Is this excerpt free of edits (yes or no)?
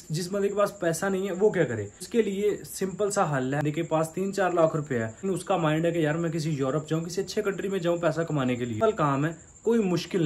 no